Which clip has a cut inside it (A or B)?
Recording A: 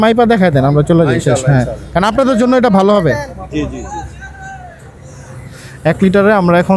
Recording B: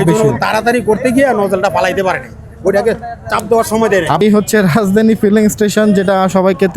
B